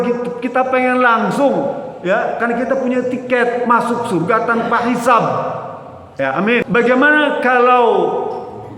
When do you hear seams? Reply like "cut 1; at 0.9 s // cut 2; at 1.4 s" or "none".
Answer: cut 1; at 6.3 s